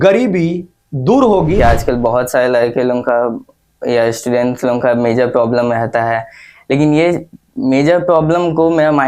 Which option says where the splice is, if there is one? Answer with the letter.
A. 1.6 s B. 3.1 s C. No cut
A